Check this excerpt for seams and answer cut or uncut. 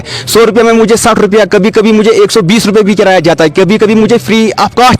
uncut